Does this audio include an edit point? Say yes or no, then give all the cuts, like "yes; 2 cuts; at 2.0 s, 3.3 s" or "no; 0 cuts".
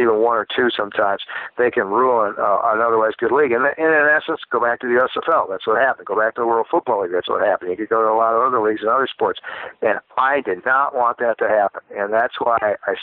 no; 0 cuts